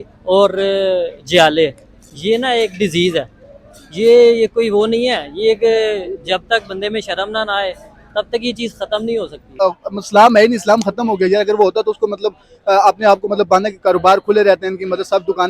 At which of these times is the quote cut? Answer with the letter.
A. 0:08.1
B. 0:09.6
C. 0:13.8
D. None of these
B